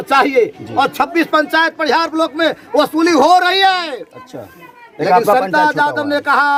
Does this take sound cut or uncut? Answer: uncut